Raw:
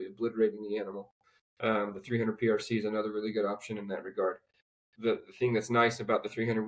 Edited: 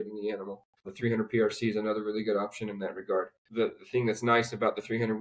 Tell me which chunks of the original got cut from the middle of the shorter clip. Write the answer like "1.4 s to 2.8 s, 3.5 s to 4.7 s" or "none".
1.4 s to 2.0 s, 4.5 s to 4.9 s